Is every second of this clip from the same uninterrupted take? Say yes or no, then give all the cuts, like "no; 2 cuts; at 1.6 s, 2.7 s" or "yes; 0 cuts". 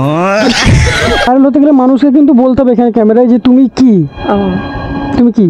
no; 1 cut; at 1.3 s